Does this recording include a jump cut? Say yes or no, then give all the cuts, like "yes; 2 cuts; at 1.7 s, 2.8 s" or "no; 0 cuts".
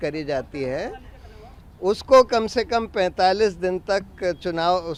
no; 0 cuts